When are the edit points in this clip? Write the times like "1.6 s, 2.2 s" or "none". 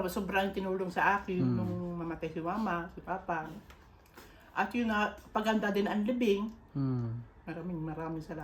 none